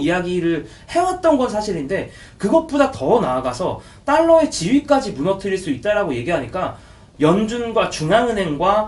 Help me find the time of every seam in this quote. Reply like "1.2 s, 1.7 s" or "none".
7.0 s